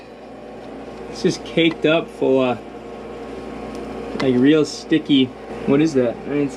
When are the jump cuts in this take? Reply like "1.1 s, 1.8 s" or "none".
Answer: 5.5 s